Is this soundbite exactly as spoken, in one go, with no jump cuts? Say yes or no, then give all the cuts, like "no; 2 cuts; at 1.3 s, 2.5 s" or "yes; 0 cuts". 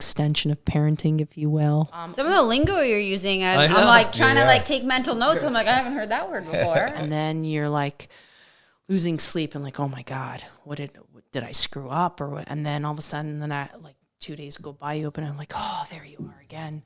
no; 2 cuts; at 2.0 s, 7.0 s